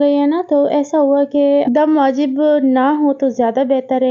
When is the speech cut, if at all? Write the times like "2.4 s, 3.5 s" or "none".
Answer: 1.7 s